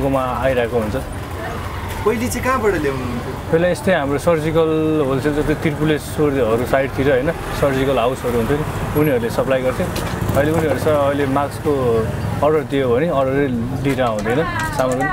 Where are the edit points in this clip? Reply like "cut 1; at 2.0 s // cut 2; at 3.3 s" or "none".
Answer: none

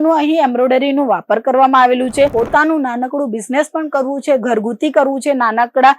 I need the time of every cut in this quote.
cut 1; at 2.3 s

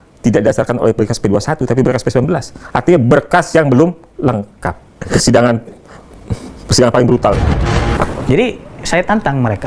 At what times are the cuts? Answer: cut 1; at 5.0 s // cut 2; at 8.0 s

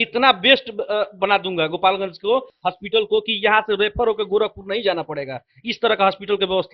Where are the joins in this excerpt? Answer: none

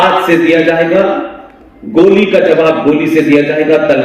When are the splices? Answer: none

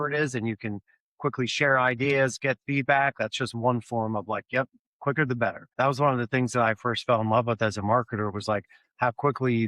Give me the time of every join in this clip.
cut 1; at 5.6 s

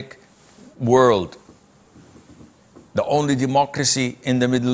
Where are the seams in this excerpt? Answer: none

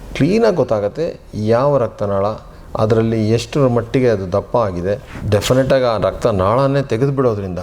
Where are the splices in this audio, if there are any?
cut 1; at 5.2 s

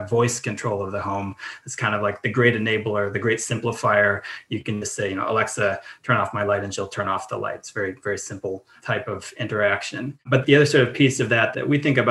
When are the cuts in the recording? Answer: none

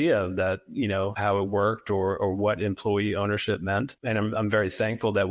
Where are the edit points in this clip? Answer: cut 1; at 1.2 s // cut 2; at 4.0 s

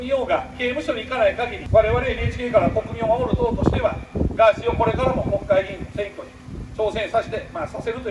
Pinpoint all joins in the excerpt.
cut 1; at 1.6 s

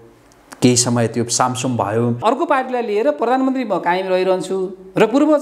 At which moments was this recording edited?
cut 1; at 2.2 s

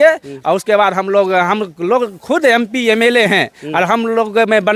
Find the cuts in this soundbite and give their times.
none

